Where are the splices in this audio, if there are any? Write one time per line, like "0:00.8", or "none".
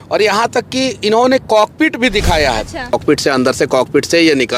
0:02.9